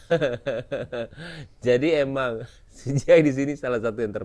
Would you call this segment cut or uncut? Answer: uncut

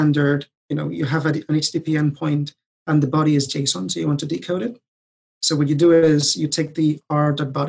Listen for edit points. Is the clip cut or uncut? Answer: uncut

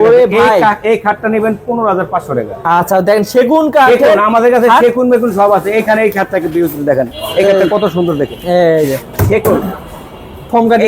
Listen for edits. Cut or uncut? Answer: uncut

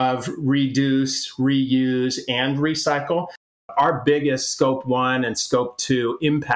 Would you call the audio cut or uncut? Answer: cut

